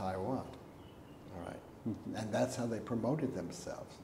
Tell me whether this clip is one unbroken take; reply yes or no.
yes